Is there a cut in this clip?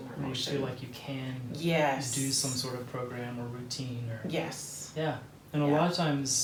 no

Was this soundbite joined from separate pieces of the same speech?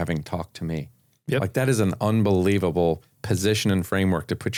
no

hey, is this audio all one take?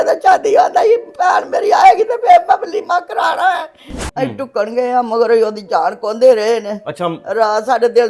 no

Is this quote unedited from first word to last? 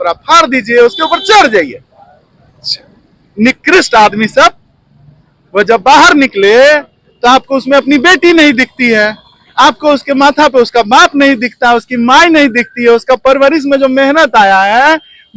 yes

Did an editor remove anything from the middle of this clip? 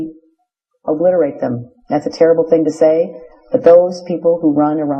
yes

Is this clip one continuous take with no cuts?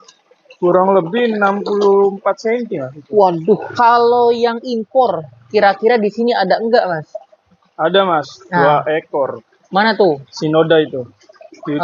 no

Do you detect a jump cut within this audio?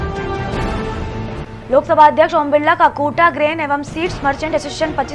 yes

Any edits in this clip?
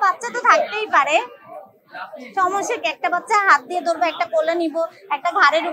no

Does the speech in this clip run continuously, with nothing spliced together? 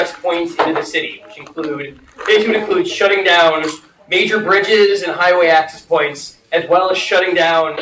yes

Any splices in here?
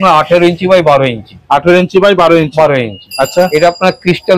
no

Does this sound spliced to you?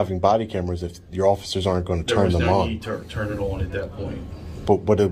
no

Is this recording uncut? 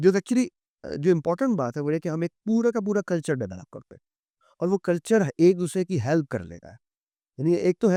yes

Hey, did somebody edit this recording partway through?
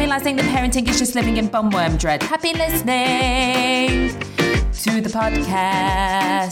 no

